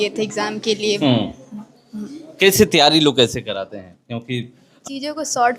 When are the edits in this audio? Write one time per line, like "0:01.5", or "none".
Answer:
0:04.7

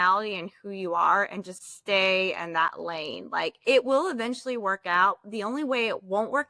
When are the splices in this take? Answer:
none

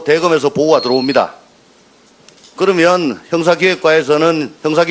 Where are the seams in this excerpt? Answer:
0:02.0

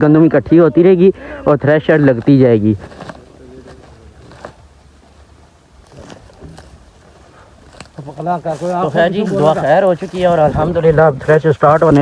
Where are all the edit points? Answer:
0:02.7

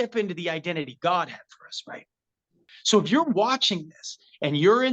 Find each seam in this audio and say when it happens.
0:02.5

